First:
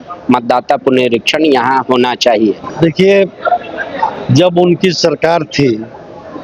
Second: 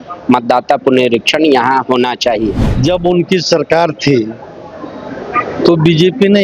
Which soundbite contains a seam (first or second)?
second